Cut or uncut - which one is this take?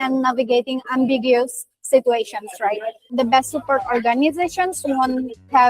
cut